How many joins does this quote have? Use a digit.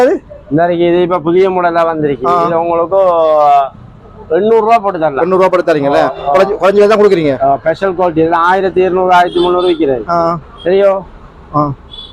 0